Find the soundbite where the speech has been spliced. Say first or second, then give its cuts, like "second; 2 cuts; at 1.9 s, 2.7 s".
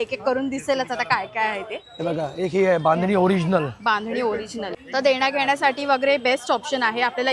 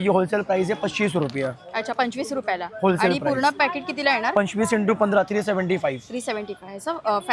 first; 1 cut; at 4.8 s